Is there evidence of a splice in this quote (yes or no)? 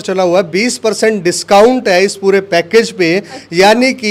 no